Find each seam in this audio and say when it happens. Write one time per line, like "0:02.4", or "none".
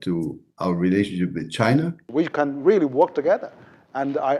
0:02.0